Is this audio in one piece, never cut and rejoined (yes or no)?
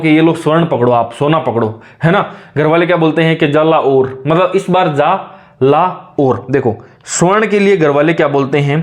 yes